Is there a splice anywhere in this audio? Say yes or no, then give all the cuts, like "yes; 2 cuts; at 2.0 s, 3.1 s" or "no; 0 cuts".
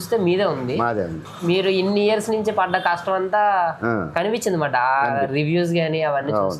no; 0 cuts